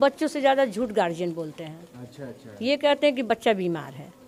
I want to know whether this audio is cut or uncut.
uncut